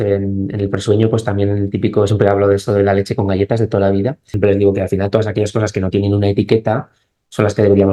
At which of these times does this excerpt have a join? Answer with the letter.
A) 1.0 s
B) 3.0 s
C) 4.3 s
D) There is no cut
C